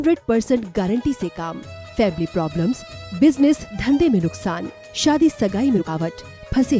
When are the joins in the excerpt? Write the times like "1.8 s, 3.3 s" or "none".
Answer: 5.8 s